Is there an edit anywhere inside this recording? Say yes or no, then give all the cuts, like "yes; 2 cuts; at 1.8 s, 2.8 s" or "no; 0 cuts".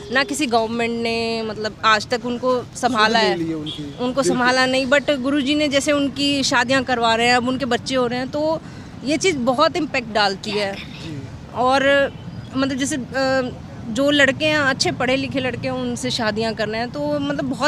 no; 0 cuts